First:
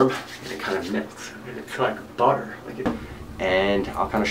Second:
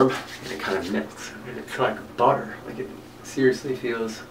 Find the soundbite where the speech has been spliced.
first; 1 cut; at 2.9 s

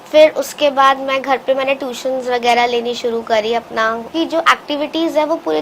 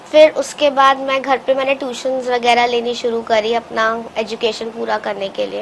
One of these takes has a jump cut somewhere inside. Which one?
first; 1 cut; at 4.1 s

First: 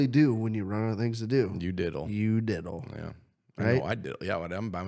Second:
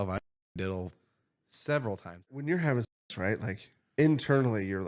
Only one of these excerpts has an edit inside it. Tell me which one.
second; 1 cut; at 2.2 s

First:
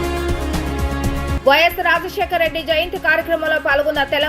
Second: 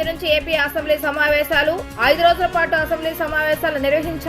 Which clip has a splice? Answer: first; 1 cut; at 1.4 s

